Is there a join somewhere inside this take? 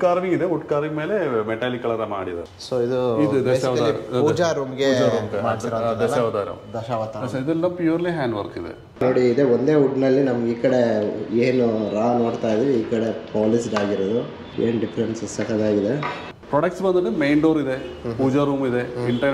yes; 3 cuts; at 2.5 s, 9.0 s, 16.3 s

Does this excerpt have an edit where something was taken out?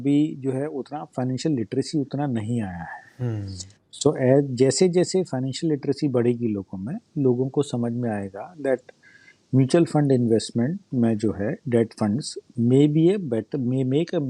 no; 0 cuts

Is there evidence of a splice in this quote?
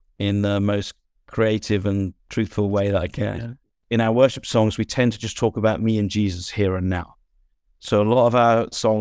yes; 1 cut; at 3.7 s

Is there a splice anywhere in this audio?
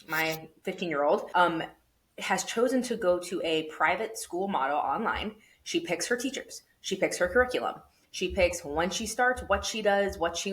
yes; 1 cut; at 1.3 s

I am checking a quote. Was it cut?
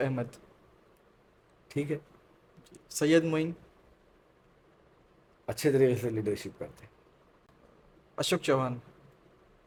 no; 0 cuts

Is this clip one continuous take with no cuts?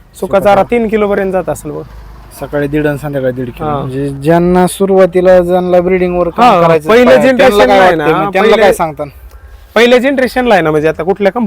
no; 1 cut; at 3.9 s

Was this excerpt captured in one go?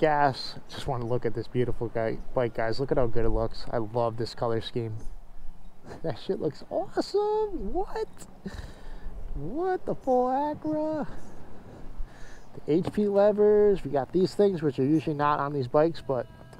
yes; 0 cuts

